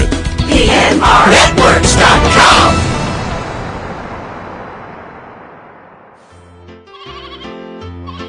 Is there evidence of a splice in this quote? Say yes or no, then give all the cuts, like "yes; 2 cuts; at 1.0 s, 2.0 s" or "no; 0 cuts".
yes; 1 cut; at 6.5 s